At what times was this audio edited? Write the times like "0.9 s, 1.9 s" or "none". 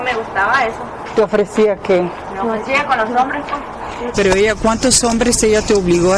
4.0 s